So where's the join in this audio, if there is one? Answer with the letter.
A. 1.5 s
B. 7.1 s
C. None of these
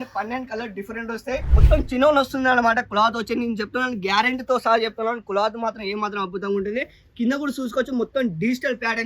A